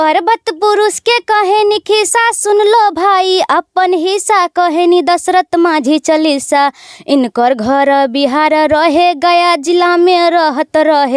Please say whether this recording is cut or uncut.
uncut